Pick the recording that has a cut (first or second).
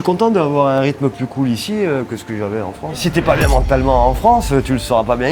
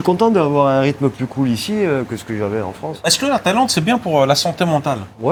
first